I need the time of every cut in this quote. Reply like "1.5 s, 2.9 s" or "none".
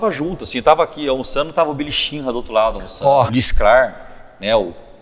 3.3 s

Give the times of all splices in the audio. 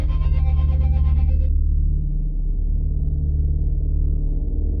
none

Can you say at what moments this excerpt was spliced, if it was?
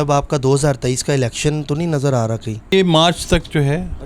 2.7 s

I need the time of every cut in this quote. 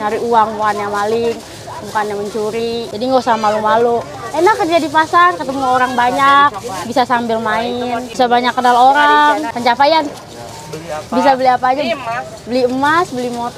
2.9 s, 8.1 s, 9.5 s

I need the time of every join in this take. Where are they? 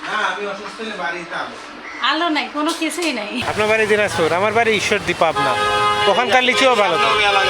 3.4 s

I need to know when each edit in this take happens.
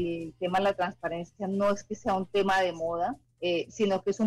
3.3 s

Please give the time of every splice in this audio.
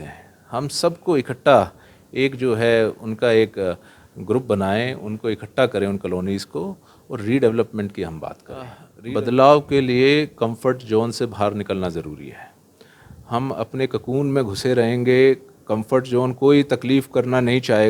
8.9 s

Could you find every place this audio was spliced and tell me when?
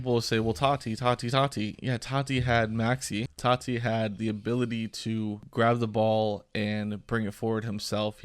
3.3 s, 5.4 s

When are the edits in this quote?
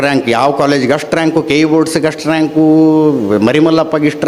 none

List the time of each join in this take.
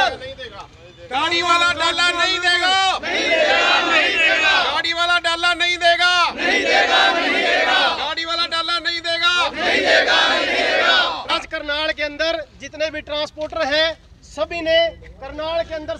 11.2 s

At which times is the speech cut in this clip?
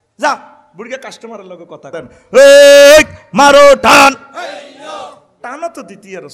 1.9 s

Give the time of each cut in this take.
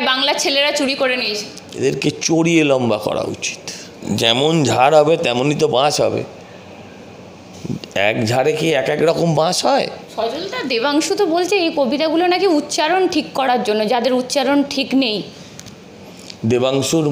1.6 s, 4.0 s, 10.0 s

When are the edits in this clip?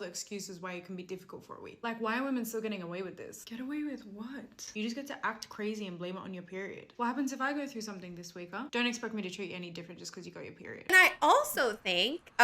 10.9 s

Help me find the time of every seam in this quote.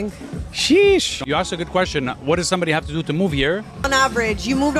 1.1 s, 3.9 s

